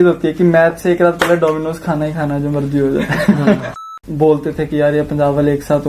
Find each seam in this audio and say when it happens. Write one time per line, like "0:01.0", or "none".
0:03.8

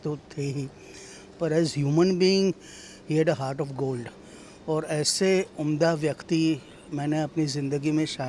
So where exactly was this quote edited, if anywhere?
none

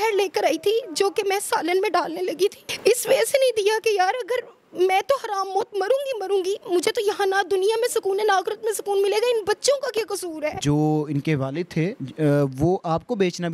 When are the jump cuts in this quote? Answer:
0:02.7
0:10.6

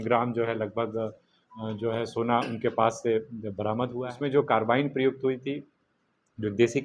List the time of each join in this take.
0:04.1

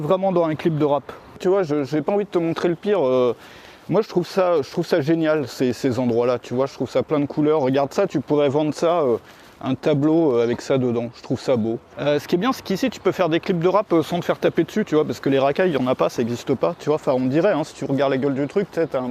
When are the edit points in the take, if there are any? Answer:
0:01.4
0:11.8

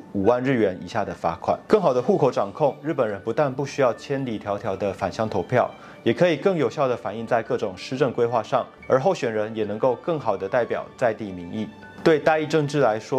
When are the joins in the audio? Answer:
0:01.6

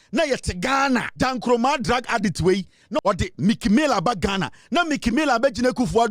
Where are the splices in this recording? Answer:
0:01.1
0:03.0

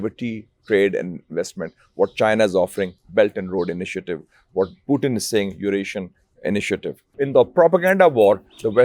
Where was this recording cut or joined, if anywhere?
0:07.2

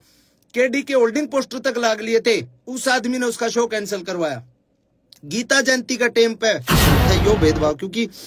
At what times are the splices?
0:06.8

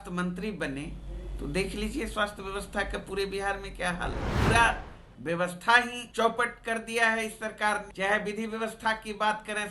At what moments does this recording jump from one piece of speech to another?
0:04.3
0:06.0
0:07.9

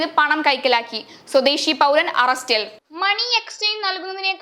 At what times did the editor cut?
none

